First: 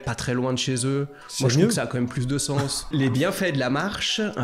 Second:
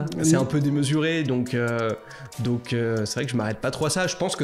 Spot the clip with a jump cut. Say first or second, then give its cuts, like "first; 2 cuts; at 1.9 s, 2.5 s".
first; 1 cut; at 2.9 s